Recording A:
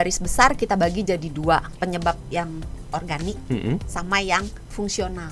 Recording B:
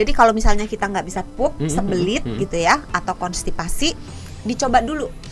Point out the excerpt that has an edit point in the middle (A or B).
A